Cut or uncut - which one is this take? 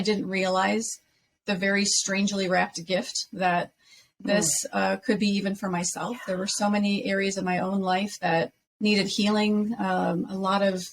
cut